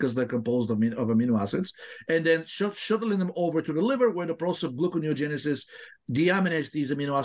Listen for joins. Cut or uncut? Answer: uncut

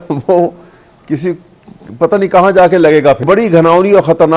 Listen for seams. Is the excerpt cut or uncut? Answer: cut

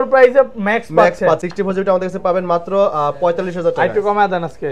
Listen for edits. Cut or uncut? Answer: cut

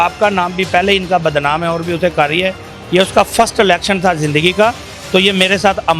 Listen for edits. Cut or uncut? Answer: uncut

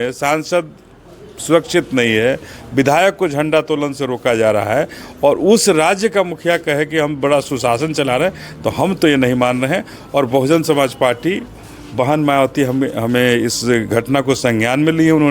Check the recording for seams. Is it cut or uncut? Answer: uncut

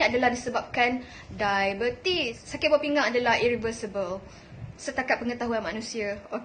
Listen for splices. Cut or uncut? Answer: cut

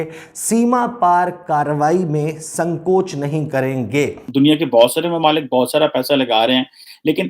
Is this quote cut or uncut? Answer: cut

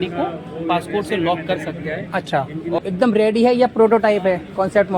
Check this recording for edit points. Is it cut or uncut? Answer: cut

